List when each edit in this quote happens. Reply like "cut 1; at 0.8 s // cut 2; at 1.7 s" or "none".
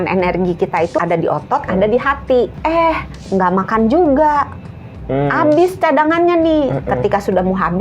cut 1; at 1.0 s // cut 2; at 2.5 s